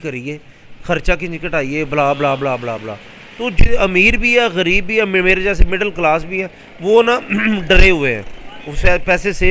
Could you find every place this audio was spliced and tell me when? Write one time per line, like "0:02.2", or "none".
none

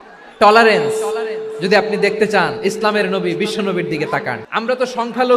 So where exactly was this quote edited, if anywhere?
0:04.4

